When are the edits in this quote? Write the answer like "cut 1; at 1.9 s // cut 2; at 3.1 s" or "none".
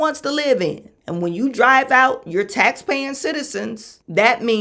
none